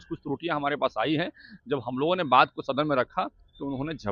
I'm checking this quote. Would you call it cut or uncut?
uncut